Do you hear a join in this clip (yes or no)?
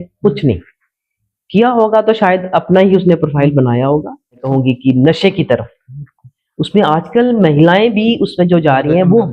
yes